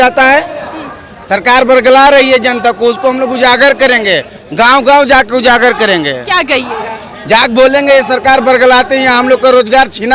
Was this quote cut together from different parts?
no; 0 cuts

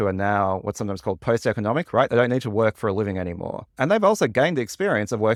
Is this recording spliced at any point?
no; 0 cuts

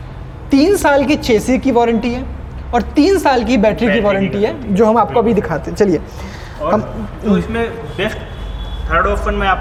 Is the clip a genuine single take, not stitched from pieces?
yes; 0 cuts

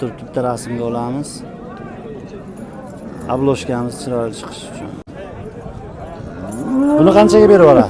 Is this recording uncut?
no; 1 cut; at 5.1 s

